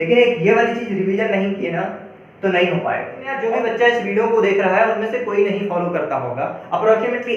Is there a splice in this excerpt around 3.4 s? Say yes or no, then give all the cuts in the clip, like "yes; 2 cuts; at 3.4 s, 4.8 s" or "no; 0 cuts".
yes; 1 cut; at 3.4 s